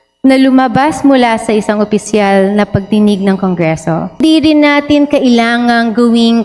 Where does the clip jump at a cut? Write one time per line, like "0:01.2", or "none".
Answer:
0:04.2